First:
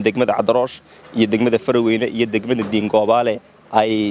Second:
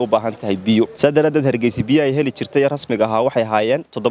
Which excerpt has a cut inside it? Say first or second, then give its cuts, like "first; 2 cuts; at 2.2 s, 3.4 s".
second; 1 cut; at 0.9 s